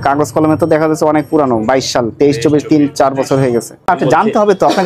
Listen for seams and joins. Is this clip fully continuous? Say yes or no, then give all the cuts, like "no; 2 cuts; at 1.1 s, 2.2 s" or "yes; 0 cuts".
no; 1 cut; at 3.9 s